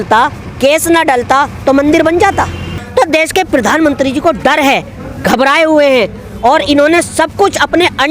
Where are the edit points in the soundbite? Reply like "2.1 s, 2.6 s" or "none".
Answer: 2.8 s